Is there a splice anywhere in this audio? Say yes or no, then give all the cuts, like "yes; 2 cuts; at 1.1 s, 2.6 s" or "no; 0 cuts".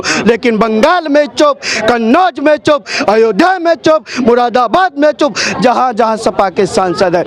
no; 0 cuts